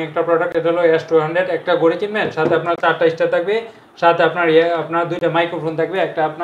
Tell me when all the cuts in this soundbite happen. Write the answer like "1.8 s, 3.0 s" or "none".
none